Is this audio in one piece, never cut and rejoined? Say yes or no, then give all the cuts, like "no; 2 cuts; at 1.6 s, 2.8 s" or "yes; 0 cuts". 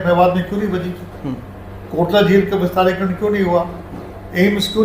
yes; 0 cuts